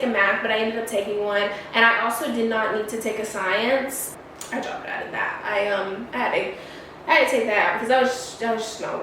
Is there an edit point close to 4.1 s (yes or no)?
yes